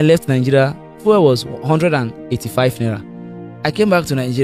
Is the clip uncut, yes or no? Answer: no